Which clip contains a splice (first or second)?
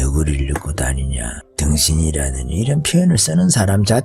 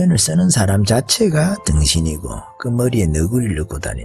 first